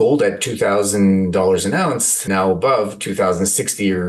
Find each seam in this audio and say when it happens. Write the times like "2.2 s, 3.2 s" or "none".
2.2 s